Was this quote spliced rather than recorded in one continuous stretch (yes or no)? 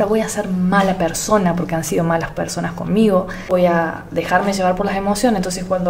yes